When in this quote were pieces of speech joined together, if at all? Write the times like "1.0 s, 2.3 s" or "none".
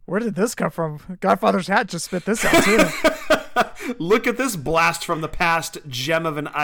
2.5 s